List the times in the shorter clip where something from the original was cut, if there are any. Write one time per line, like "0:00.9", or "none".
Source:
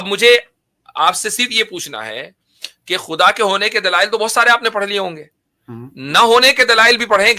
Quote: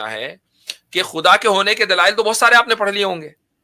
none

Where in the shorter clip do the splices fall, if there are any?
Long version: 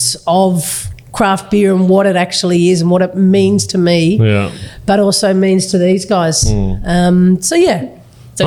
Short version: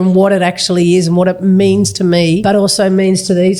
0:02.4

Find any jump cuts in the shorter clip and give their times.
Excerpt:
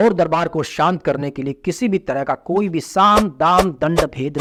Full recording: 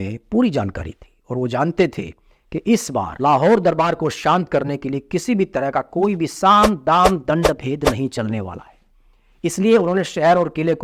none

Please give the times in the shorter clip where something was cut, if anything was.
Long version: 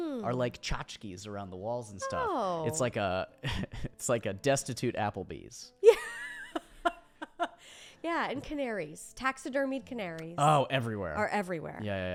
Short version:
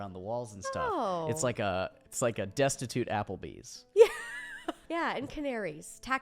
0:02.0
0:04.8

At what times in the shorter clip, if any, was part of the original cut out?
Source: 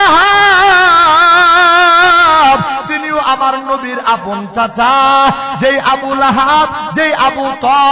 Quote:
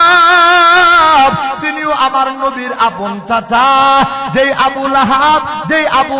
none

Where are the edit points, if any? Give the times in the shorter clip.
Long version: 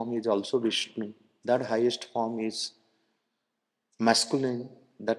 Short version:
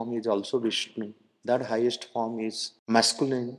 0:02.7

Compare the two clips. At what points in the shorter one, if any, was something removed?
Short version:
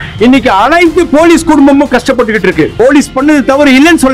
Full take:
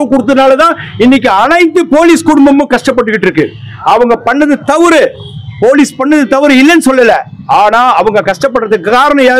0:02.7

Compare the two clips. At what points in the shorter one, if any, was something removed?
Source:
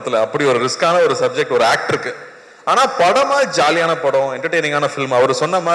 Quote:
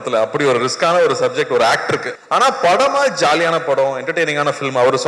0:02.1

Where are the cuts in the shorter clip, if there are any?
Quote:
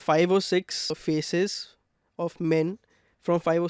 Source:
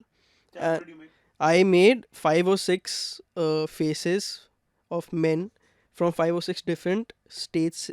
0:01.0

